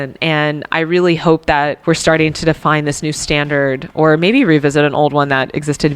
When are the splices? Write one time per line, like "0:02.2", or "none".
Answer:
0:01.8
0:03.9